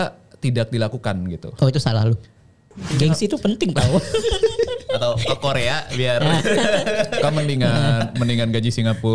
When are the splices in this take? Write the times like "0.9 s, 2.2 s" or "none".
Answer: 2.9 s